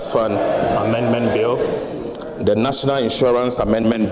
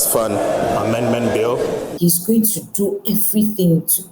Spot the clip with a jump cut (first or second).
second